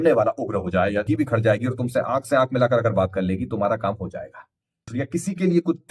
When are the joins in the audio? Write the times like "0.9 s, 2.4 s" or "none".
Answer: 1.1 s, 4.9 s

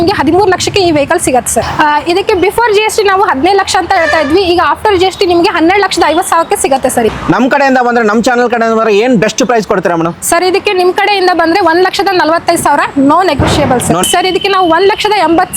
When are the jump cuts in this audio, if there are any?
1.7 s, 7.1 s, 14.0 s

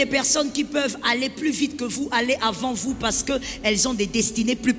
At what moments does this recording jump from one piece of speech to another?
none

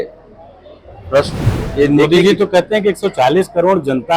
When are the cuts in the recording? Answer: 1.4 s

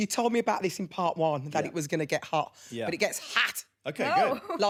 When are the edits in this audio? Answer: none

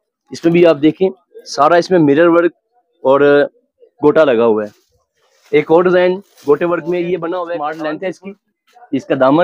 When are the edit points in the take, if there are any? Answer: 7.5 s

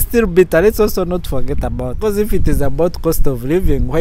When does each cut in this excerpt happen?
1.9 s

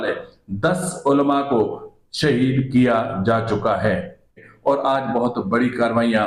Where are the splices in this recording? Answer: 4.5 s

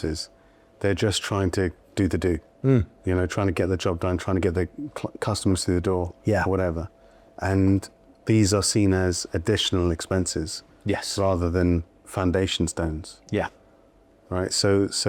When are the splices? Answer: none

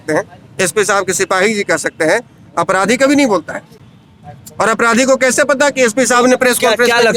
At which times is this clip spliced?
none

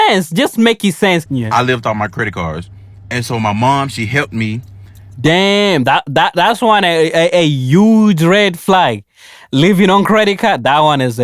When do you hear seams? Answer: 1.3 s

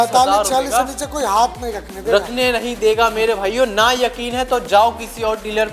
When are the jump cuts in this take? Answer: none

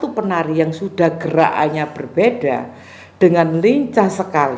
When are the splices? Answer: none

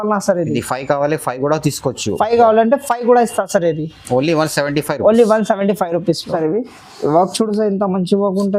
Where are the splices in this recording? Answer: none

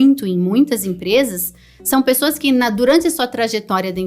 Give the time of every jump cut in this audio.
none

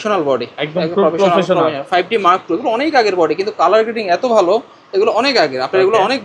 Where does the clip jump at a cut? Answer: none

